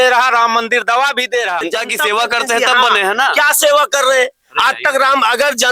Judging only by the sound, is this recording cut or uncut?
cut